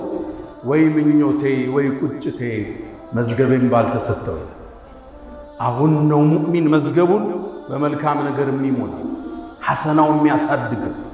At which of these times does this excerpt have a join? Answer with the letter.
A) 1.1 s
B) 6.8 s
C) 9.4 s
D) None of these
D